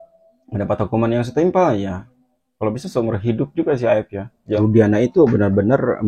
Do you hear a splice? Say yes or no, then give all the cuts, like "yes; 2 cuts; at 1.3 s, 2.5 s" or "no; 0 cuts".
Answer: yes; 1 cut; at 4.6 s